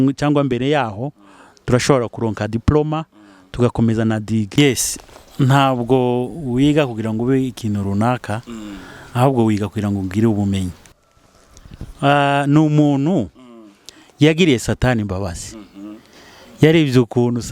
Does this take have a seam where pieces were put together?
yes; 2 cuts; at 4.6 s, 10.9 s

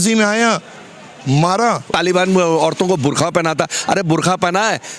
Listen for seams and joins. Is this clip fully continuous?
no; 1 cut; at 1.9 s

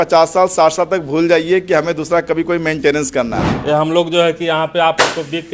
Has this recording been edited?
yes; 1 cut; at 3.5 s

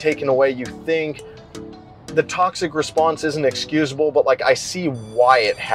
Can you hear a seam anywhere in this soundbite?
no; 0 cuts

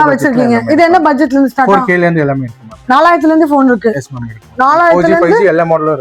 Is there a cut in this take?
no; 0 cuts

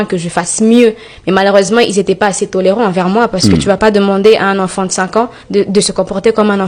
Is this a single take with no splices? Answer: yes; 0 cuts

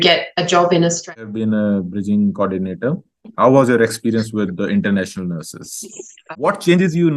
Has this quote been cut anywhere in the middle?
yes; 2 cuts; at 1.2 s, 6.1 s

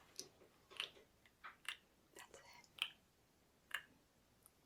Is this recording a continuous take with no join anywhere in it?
yes; 0 cuts

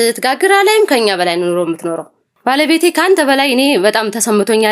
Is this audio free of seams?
no; 1 cut; at 2.3 s

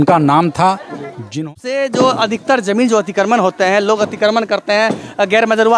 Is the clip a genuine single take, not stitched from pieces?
no; 1 cut; at 1.3 s

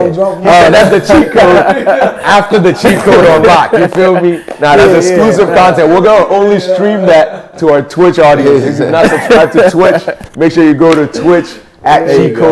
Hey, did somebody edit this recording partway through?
no; 0 cuts

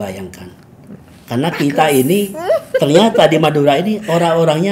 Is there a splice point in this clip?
no; 0 cuts

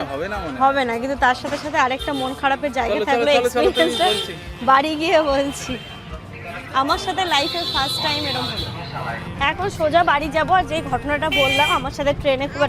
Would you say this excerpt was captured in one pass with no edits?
no; 1 cut; at 9.3 s

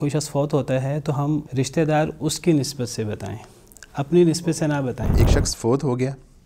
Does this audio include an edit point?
yes; 2 cuts; at 1.5 s, 5.1 s

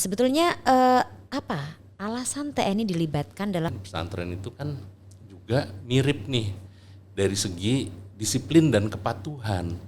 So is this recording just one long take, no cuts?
no; 1 cut; at 3.7 s

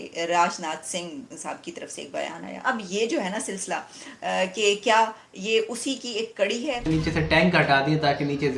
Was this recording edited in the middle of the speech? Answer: yes; 2 cuts; at 2.5 s, 6.8 s

